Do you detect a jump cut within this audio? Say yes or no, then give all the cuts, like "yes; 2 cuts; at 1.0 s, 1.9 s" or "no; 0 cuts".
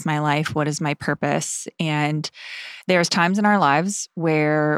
no; 0 cuts